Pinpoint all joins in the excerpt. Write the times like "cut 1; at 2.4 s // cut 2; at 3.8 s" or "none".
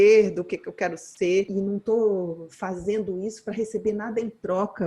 cut 1; at 1.5 s